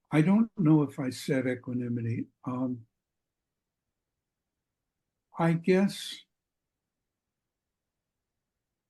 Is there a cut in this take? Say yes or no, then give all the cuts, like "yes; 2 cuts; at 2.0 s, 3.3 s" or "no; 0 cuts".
no; 0 cuts